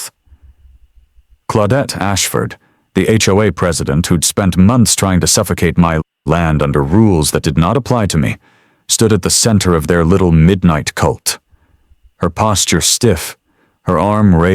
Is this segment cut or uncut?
cut